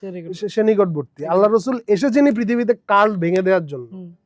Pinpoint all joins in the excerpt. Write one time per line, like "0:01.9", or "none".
none